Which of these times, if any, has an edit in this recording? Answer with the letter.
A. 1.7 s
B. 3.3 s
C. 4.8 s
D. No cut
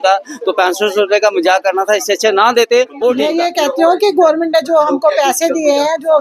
B